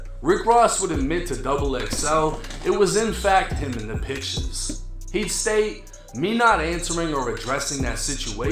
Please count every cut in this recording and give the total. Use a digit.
0